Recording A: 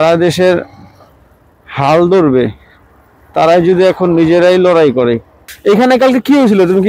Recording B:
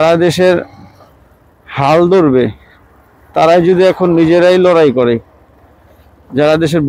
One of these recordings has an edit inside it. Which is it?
A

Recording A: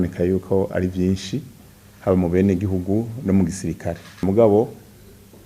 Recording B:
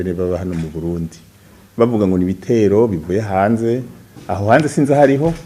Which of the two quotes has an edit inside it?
A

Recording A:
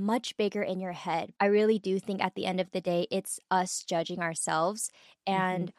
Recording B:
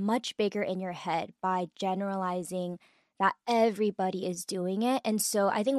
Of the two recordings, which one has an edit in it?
A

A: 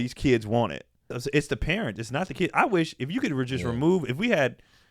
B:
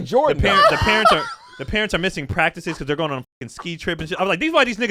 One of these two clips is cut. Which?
A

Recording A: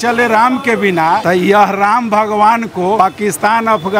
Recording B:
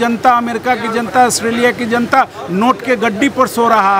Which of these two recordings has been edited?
A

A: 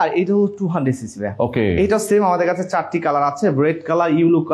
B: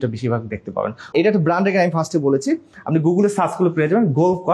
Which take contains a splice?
B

